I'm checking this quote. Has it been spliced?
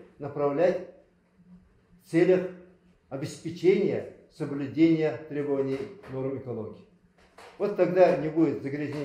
no; 0 cuts

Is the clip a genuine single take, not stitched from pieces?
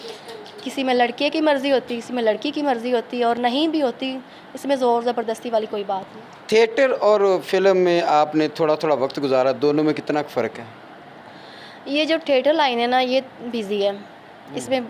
yes; 0 cuts

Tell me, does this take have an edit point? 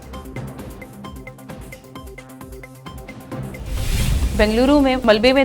yes; 1 cut; at 3.8 s

